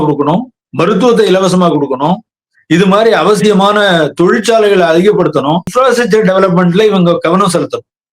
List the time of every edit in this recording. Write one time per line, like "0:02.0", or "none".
0:05.7